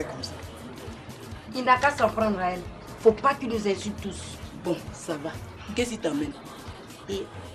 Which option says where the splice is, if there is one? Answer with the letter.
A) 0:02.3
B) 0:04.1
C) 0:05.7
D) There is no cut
A